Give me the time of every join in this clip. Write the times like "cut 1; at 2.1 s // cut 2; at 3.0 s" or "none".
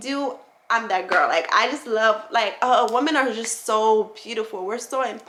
none

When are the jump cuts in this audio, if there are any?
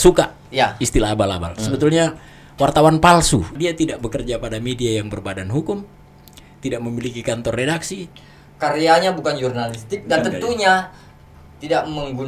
cut 1; at 3.5 s // cut 2; at 8.0 s

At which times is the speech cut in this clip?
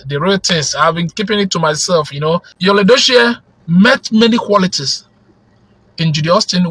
cut 1; at 2.5 s

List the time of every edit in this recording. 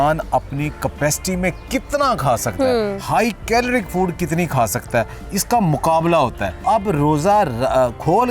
cut 1; at 6.5 s

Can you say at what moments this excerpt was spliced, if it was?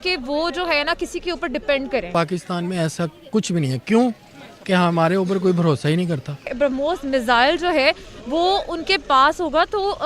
cut 1; at 2.1 s // cut 2; at 6.5 s

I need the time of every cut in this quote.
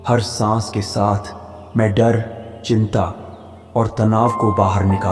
none

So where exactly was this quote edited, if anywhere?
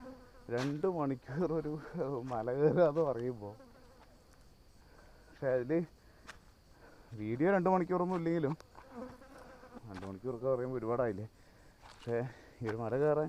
none

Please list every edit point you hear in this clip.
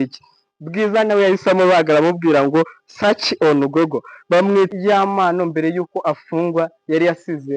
cut 1; at 4.7 s

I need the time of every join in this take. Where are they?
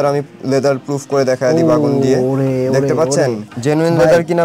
cut 1; at 3.5 s

